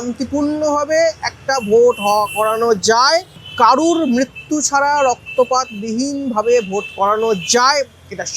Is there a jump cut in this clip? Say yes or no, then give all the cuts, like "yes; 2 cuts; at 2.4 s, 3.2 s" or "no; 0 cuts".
no; 0 cuts